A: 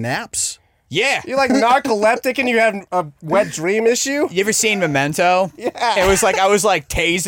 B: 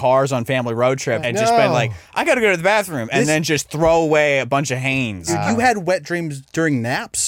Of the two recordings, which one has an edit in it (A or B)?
B